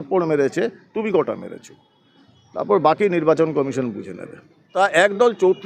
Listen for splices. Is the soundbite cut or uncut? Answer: cut